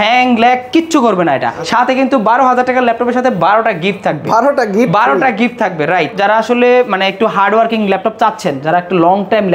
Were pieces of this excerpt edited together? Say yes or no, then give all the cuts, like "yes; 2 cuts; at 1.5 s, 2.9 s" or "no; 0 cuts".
yes; 2 cuts; at 1.6 s, 6.2 s